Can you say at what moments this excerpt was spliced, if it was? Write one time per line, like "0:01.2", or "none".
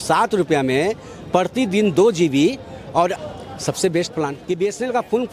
0:03.3
0:04.4

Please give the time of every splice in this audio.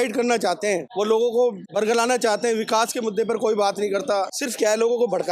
0:00.9
0:01.6
0:04.4

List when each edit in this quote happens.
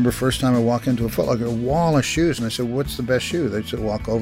none

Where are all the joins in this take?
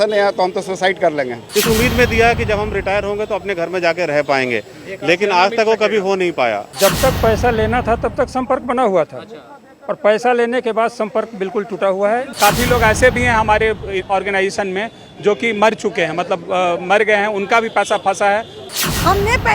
0:01.4
0:06.7
0:12.3
0:18.7

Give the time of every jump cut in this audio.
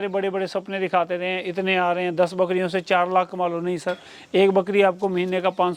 none

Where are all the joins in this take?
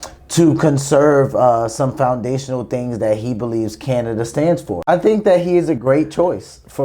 0:04.7

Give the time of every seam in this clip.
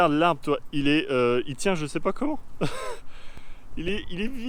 none

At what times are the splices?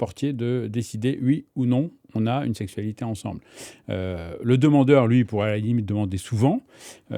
none

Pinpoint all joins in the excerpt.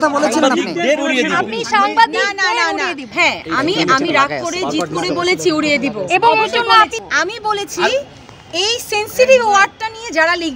0:03.1
0:07.0

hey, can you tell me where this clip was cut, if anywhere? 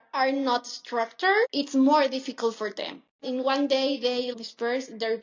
0:01.5
0:03.2
0:04.3

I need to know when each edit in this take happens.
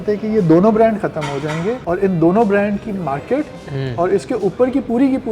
0:01.8

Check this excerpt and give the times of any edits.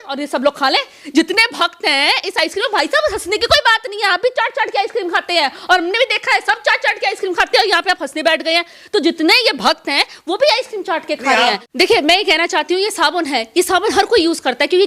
0:11.7

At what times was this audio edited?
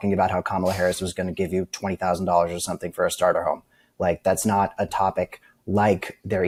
none

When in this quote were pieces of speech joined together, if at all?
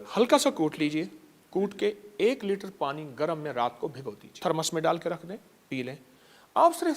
0:04.3

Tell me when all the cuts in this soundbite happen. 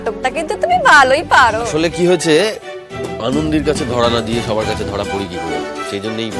0:01.7

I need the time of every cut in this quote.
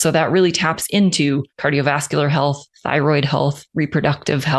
0:01.5
0:02.7
0:03.6

